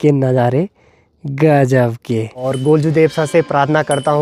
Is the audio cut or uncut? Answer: cut